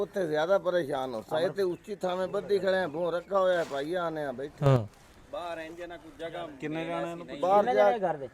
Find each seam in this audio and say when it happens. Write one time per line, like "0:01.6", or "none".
none